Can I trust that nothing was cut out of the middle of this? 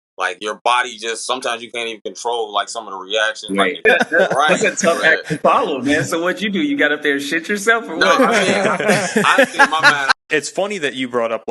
no; 2 cuts; at 3.8 s, 10.1 s

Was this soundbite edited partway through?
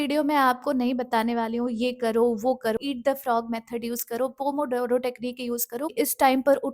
yes; 2 cuts; at 2.8 s, 5.9 s

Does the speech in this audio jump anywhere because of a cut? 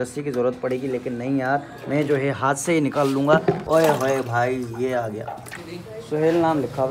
yes; 2 cuts; at 3.6 s, 5.5 s

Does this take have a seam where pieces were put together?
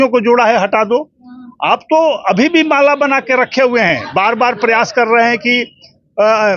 no; 0 cuts

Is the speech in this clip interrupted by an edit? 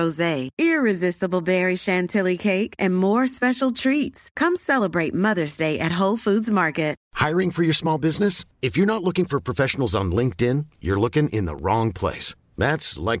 yes; 1 cut; at 7.0 s

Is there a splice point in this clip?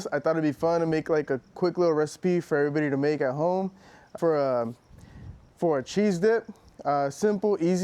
yes; 1 cut; at 4.1 s

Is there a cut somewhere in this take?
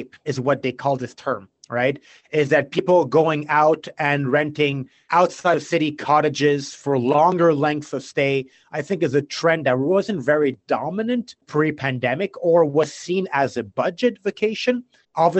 no; 0 cuts

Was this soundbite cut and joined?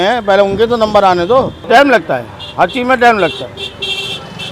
no; 0 cuts

